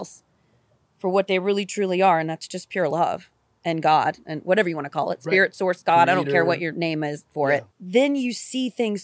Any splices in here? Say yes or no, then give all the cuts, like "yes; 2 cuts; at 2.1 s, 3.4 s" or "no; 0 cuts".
yes; 1 cut; at 7.8 s